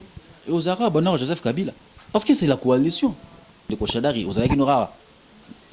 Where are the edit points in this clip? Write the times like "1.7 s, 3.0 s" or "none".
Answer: 3.7 s